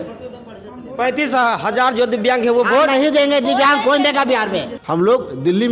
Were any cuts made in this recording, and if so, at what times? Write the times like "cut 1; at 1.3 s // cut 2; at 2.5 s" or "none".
cut 1; at 4.8 s